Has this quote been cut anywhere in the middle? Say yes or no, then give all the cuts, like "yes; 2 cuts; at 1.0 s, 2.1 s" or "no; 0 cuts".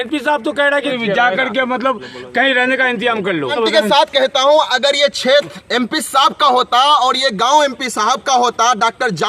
yes; 2 cuts; at 0.9 s, 3.5 s